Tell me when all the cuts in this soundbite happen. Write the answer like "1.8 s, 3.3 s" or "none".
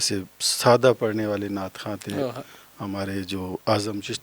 none